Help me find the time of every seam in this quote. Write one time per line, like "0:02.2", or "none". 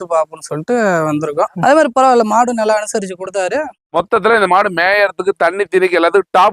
0:01.5
0:03.9